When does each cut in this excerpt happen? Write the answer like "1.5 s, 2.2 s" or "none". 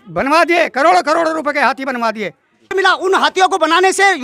2.7 s